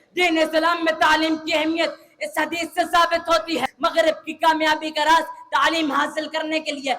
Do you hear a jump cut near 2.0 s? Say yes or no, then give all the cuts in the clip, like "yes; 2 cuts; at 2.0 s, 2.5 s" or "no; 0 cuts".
no; 1 cut; at 3.7 s